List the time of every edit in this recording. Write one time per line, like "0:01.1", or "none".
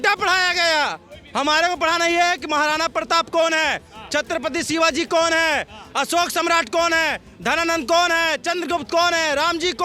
none